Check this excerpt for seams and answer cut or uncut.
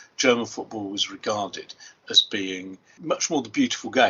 cut